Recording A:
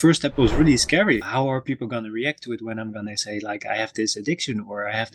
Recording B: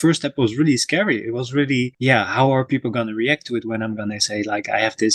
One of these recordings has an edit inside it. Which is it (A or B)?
A